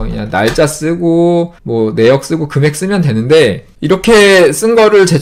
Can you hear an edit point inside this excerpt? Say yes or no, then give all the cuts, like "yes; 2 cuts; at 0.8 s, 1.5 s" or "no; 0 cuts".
no; 0 cuts